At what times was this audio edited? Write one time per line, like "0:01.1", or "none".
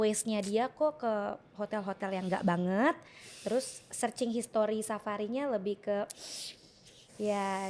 none